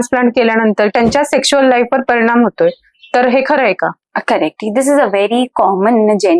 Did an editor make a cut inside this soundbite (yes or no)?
yes